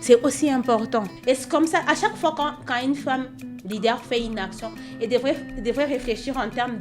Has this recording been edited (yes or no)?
yes